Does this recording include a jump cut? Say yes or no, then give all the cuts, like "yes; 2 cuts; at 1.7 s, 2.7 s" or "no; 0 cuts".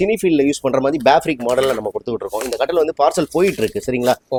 no; 0 cuts